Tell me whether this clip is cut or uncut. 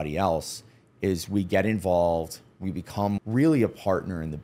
cut